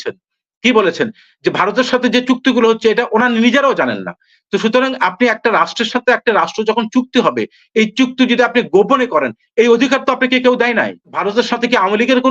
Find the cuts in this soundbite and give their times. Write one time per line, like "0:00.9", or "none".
0:11.1